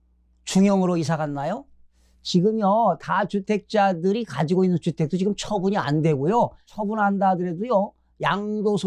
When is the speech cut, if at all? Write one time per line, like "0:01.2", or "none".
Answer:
0:06.7